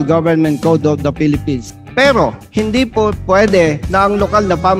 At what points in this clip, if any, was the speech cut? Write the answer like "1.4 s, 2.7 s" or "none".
1.7 s, 2.4 s, 3.8 s